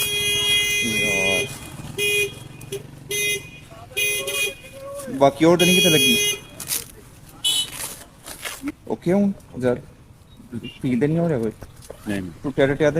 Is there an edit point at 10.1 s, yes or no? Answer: no